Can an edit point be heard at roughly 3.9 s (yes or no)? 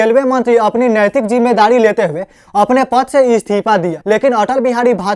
yes